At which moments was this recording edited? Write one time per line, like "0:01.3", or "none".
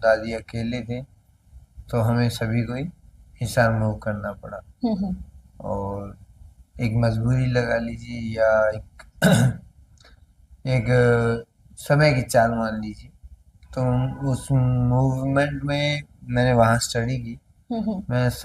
none